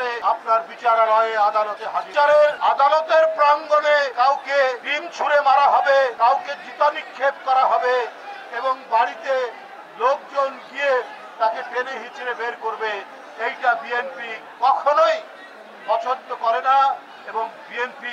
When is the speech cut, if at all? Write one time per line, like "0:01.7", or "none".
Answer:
none